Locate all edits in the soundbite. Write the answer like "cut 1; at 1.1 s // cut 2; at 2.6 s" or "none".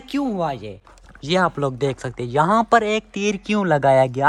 none